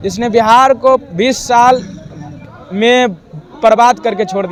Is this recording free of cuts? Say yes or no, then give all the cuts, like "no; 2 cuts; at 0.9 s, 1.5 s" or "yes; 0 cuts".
yes; 0 cuts